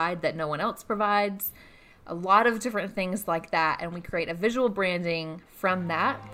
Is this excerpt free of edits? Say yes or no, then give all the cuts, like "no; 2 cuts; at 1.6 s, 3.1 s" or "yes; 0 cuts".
yes; 0 cuts